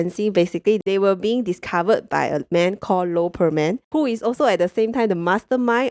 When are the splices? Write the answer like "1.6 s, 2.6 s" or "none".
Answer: none